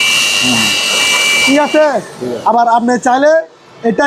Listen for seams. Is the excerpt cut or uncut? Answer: uncut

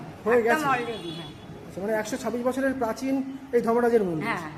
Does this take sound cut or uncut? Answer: uncut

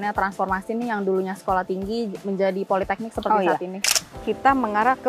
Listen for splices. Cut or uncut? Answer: cut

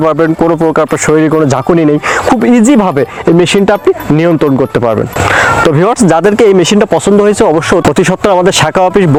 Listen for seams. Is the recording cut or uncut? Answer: uncut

